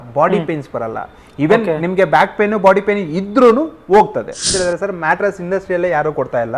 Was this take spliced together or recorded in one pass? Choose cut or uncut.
cut